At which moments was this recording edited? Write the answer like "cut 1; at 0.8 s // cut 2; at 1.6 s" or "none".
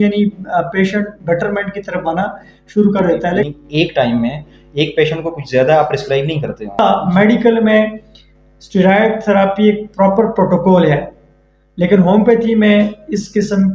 cut 1; at 3.5 s // cut 2; at 6.8 s